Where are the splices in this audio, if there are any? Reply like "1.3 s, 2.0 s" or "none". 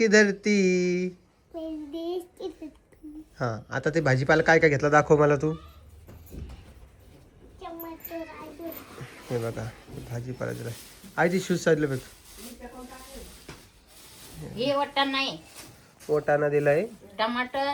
none